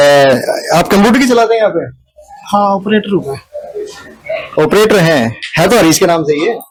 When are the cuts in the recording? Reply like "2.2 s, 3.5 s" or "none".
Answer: none

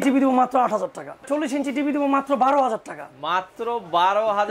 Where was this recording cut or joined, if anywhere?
1.3 s

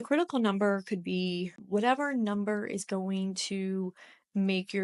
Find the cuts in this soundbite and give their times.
1.6 s

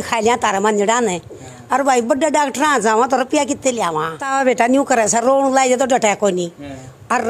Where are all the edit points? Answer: 4.2 s

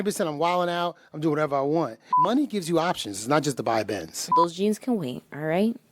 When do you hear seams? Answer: 2.0 s, 4.3 s

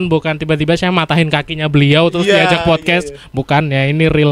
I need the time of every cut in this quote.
none

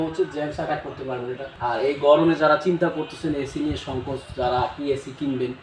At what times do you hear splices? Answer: 1.4 s

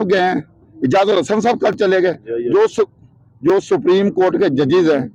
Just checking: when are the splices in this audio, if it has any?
none

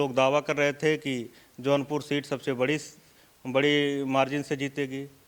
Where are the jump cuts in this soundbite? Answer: none

